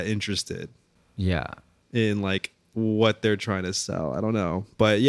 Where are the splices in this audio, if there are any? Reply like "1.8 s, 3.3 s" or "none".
1.3 s

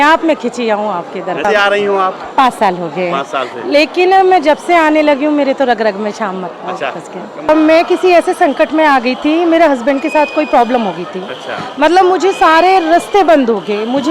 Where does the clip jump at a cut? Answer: 1.4 s, 7.5 s

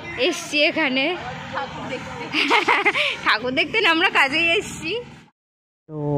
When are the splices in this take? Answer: 5.1 s

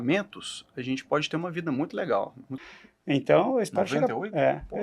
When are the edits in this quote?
2.5 s

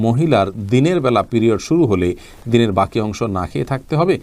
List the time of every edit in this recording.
none

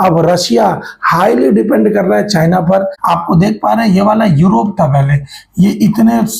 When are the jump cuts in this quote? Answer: 3.0 s

